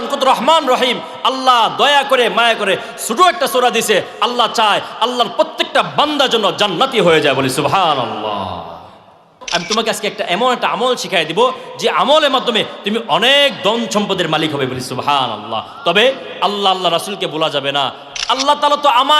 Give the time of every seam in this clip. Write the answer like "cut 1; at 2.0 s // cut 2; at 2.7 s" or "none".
cut 1; at 9.4 s // cut 2; at 18.0 s